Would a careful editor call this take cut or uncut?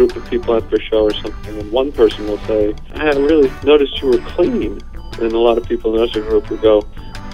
cut